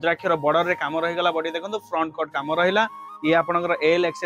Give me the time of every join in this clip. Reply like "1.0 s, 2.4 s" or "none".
none